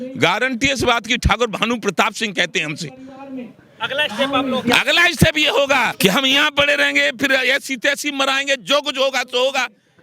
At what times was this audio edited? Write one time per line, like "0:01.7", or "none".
0:05.9